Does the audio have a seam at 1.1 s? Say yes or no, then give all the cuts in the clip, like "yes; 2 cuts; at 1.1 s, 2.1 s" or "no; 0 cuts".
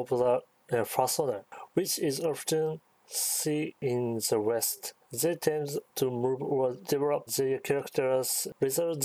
no; 4 cuts; at 3.8 s, 4.8 s, 5.8 s, 7.0 s